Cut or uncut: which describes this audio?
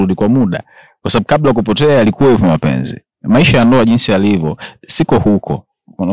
uncut